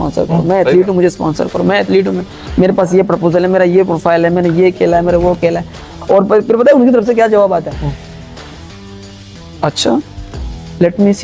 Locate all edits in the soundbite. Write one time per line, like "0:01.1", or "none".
none